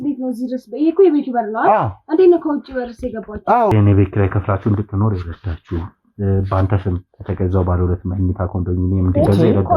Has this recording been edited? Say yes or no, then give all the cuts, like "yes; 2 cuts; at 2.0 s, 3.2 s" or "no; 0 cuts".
yes; 1 cut; at 3.7 s